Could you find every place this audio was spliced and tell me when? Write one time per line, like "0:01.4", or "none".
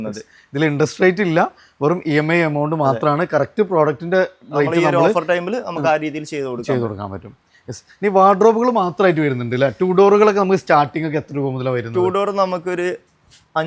none